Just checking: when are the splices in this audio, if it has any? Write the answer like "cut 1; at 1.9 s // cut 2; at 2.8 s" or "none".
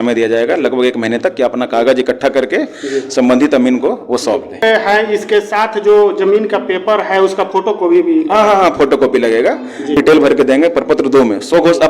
cut 1; at 4.6 s // cut 2; at 9.9 s